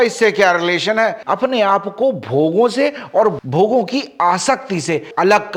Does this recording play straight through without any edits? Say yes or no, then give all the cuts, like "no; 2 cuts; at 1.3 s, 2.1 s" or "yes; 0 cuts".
no; 1 cut; at 1.2 s